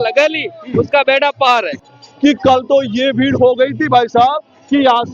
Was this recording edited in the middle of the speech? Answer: yes; 1 cut; at 2.0 s

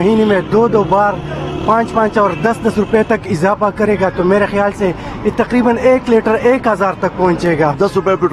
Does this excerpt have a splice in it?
no; 0 cuts

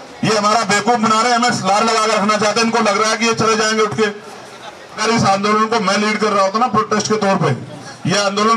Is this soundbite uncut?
no; 1 cut; at 5.0 s

